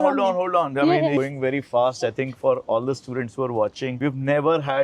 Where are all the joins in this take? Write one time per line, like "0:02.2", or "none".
0:01.2
0:03.9